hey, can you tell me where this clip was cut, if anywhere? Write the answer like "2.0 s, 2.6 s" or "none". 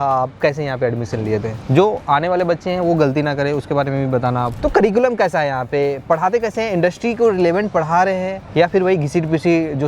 4.5 s